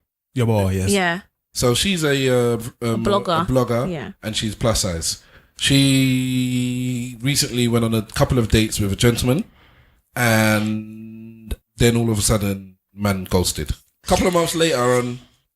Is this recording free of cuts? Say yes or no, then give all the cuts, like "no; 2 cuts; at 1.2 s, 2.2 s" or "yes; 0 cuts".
no; 3 cuts; at 1.5 s, 11.5 s, 13.9 s